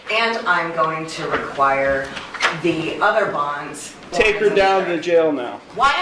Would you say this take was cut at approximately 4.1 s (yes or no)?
yes